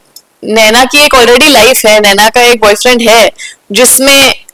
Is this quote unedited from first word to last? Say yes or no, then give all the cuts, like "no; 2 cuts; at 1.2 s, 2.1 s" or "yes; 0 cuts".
yes; 0 cuts